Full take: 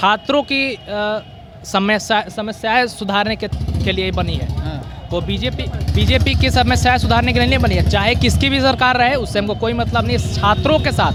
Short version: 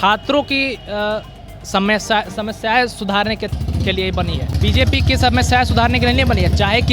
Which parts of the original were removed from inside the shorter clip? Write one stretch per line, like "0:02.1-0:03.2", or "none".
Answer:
0:04.5-0:05.8